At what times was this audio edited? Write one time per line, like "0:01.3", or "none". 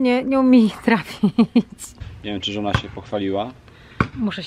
0:02.1